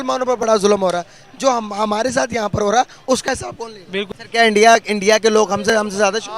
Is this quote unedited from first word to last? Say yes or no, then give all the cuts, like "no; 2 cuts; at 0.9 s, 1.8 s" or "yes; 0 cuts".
no; 1 cut; at 4.1 s